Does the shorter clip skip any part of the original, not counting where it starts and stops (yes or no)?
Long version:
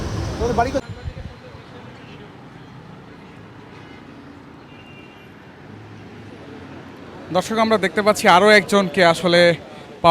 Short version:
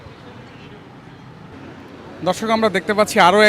yes